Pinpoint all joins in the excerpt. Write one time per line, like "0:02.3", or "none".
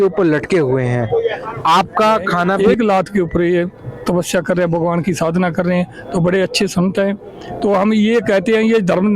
0:02.6